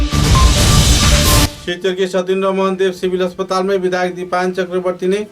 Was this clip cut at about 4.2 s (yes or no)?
no